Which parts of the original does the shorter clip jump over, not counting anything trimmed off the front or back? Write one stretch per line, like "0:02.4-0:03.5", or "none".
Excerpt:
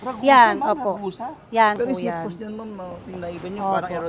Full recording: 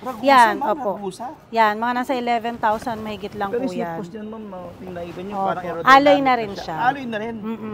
0:01.8-0:03.5

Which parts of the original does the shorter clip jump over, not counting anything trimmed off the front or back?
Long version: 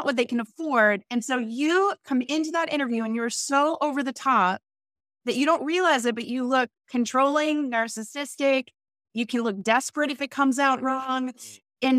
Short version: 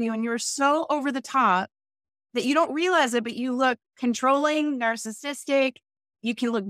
none

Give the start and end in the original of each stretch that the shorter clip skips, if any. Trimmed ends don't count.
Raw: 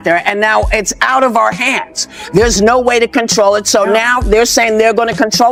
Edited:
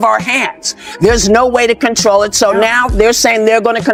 none

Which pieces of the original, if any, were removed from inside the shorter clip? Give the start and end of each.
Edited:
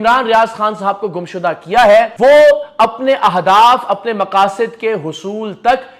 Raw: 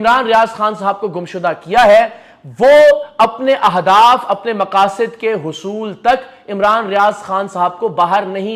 0:02.1-0:02.5

